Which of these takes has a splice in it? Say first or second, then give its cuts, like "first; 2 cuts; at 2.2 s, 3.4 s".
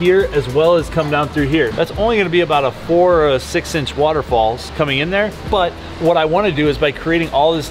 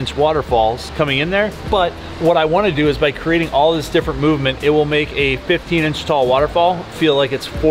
first; 1 cut; at 1.7 s